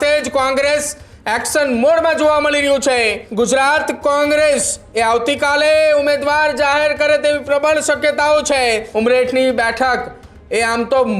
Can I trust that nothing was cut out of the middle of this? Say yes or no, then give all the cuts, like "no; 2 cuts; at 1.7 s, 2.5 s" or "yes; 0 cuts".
no; 2 cuts; at 3.2 s, 8.9 s